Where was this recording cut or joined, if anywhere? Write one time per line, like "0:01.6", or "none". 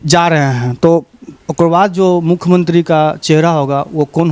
none